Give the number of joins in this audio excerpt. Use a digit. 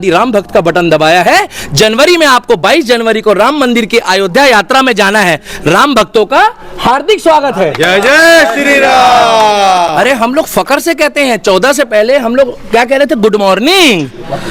0